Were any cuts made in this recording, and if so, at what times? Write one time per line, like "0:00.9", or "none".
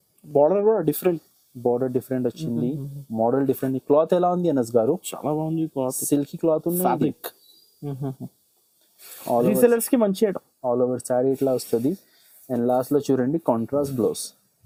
none